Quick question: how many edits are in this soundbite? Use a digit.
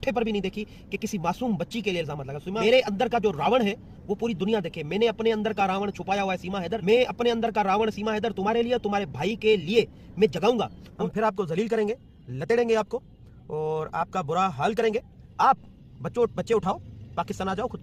4